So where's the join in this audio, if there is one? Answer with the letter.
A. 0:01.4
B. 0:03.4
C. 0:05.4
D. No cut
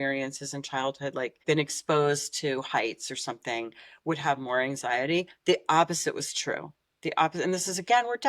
A